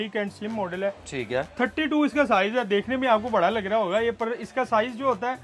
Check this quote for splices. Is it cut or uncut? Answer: uncut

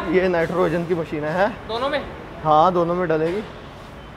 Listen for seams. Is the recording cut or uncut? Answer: uncut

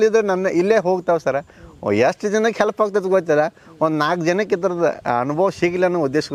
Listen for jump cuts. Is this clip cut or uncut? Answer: uncut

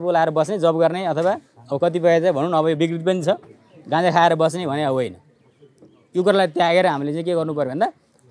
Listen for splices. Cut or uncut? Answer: uncut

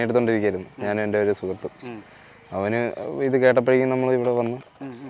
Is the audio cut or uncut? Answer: uncut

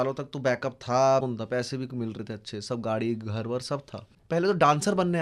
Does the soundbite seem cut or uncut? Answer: cut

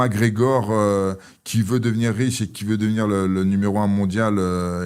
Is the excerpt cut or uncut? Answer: uncut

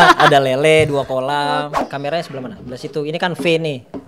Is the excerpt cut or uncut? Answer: cut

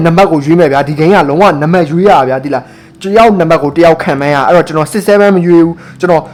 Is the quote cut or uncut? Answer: uncut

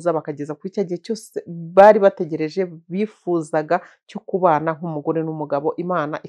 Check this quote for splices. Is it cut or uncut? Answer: uncut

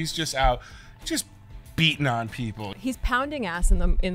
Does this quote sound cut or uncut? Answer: cut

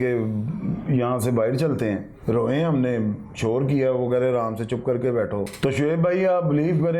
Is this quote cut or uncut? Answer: cut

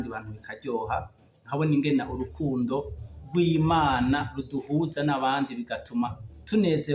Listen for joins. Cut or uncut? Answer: uncut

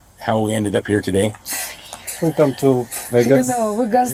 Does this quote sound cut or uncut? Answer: uncut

